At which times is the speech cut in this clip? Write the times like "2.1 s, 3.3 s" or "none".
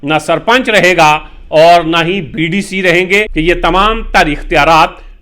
3.3 s

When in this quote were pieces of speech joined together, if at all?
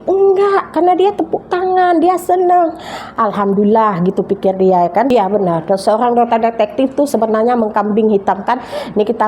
5.1 s

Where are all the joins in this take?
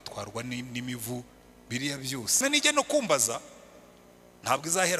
2.4 s

